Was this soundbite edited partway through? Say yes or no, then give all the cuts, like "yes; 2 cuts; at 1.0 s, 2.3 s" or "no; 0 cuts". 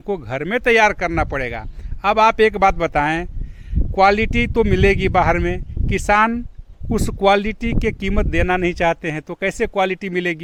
no; 0 cuts